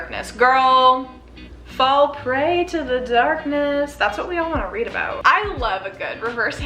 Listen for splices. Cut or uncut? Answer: cut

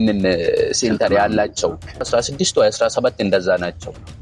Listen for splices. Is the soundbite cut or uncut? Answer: cut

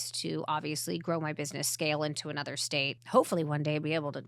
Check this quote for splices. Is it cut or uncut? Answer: cut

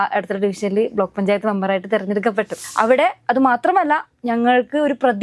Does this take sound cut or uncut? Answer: cut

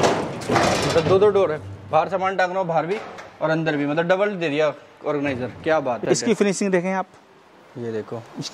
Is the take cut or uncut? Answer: cut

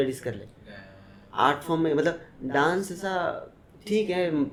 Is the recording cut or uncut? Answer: uncut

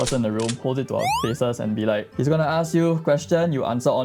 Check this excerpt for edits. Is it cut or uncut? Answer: uncut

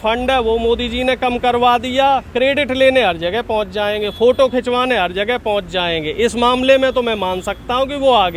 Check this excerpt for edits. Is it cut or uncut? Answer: uncut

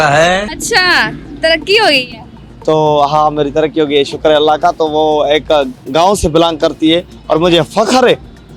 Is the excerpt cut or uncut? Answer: uncut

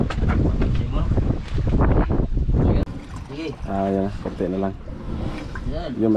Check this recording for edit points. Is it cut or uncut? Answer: cut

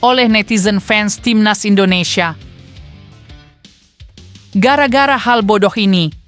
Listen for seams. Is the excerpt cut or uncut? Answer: uncut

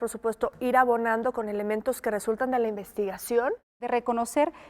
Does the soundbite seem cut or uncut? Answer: cut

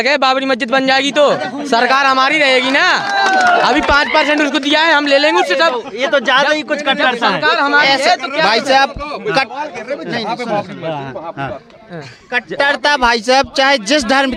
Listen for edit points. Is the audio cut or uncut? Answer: uncut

